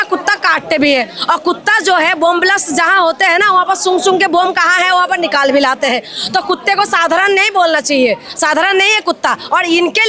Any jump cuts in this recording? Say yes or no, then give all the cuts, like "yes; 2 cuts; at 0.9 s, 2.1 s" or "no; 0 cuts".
no; 0 cuts